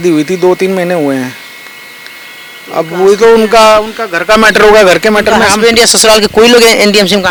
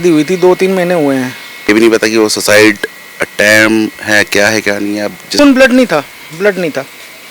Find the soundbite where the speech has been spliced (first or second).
second